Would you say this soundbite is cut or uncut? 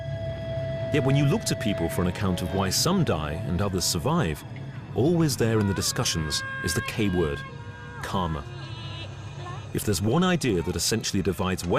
cut